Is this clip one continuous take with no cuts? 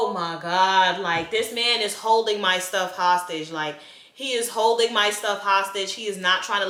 yes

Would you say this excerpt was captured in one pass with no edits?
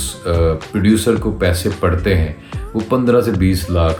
yes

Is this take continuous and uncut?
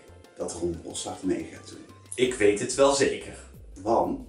yes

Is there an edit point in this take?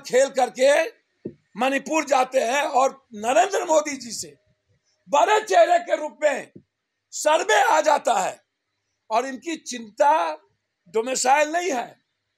no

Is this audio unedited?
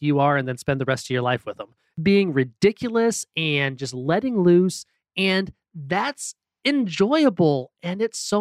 no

